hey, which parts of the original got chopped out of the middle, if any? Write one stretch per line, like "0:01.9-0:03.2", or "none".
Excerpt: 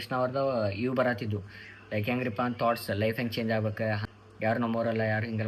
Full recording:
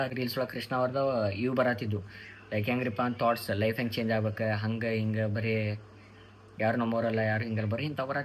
0:04.6-0:06.2